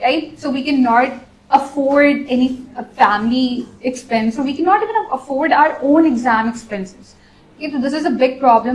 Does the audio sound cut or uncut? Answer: uncut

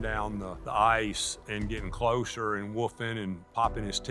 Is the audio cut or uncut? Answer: uncut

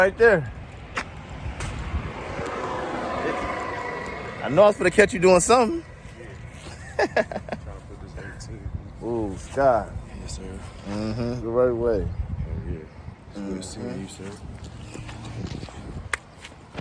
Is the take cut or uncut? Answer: uncut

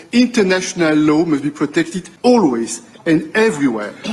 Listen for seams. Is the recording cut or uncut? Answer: uncut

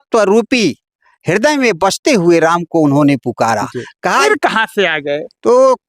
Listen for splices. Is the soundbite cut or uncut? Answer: cut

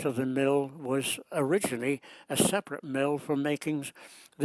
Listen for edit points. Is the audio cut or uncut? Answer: uncut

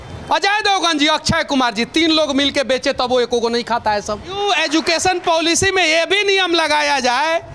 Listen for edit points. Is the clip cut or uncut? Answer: cut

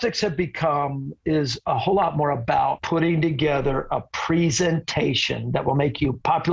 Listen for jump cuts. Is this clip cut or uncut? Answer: cut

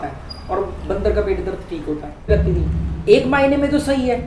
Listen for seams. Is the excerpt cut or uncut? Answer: cut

